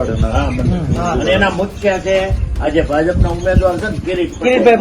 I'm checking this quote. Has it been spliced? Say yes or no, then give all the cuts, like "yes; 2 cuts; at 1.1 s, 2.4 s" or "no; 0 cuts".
no; 0 cuts